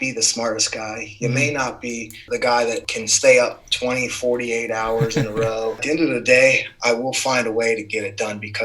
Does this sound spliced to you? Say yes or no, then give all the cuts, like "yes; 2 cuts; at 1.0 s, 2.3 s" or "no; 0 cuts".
yes; 3 cuts; at 2.2 s, 2.9 s, 5.8 s